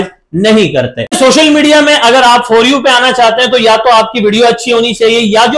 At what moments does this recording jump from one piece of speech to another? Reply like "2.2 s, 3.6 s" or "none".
1.2 s